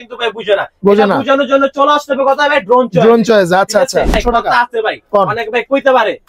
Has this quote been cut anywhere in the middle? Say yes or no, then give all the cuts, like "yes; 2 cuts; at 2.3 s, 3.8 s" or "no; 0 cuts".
yes; 1 cut; at 4.2 s